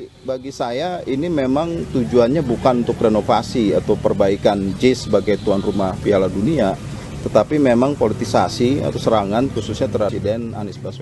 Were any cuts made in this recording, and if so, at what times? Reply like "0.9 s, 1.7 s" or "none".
none

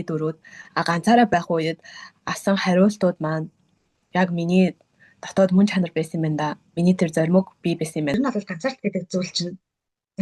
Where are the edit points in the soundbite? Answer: 8.1 s

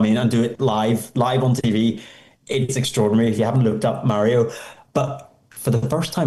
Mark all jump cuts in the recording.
none

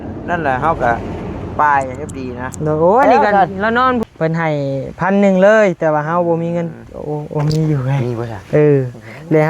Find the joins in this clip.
4.0 s

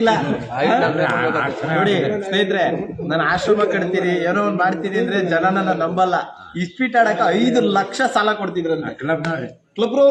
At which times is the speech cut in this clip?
none

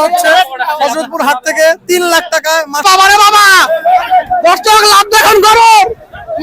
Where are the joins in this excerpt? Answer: 2.7 s

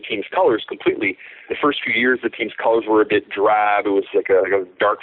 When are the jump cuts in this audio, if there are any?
1.5 s

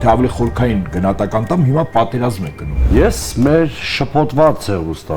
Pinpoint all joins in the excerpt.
2.9 s

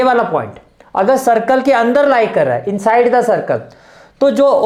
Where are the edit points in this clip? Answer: none

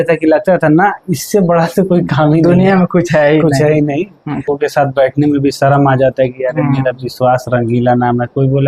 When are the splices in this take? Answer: 4.5 s

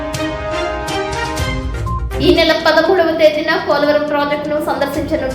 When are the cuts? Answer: 1.4 s

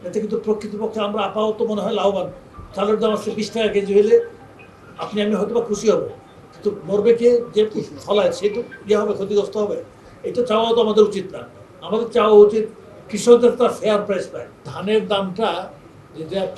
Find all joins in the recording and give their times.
14.7 s

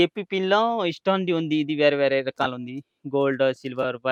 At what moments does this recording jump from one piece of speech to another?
none

